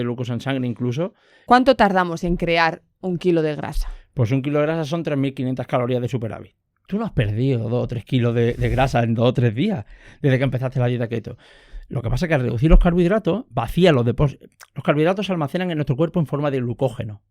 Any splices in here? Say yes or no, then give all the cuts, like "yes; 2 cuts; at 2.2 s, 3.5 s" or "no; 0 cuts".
yes; 2 cuts; at 1.3 s, 6.7 s